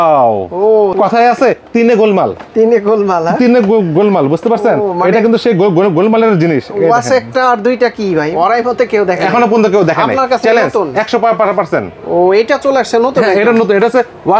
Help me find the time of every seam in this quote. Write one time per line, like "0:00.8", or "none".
0:00.9
0:08.3